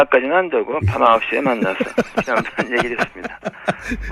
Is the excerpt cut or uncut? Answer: uncut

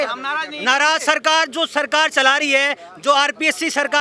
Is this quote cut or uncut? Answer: uncut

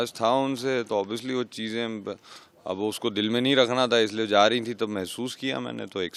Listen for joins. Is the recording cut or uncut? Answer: uncut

